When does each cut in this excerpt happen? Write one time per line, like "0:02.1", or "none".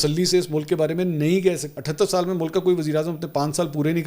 0:01.7